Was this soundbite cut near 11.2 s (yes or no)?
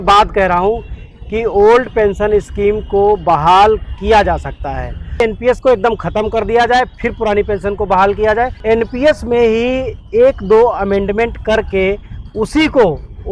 no